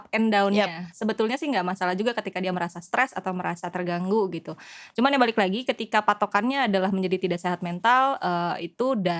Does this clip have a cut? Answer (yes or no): no